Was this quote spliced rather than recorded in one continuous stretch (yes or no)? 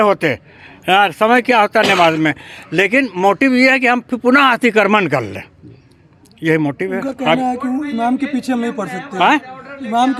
no